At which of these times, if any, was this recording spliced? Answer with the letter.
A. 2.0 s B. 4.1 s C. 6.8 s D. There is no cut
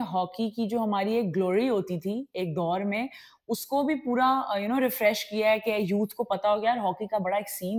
D